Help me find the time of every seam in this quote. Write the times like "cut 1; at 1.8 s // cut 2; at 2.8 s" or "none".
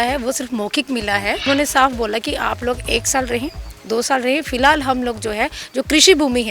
cut 1; at 1.4 s